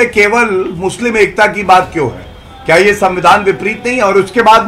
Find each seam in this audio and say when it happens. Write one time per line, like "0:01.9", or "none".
none